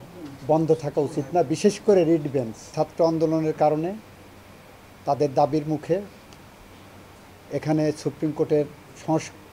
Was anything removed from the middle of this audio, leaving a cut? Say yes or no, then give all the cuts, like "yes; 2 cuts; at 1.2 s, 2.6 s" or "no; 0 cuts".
yes; 1 cut; at 2.7 s